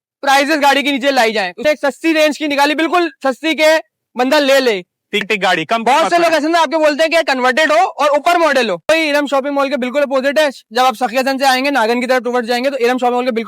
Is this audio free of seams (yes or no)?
no